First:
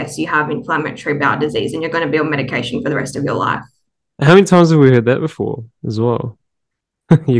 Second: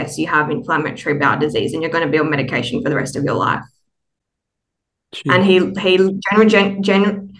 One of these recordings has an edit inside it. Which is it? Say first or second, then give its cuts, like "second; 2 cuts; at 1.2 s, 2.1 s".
first; 1 cut; at 4.0 s